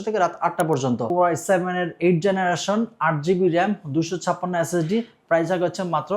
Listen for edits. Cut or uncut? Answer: cut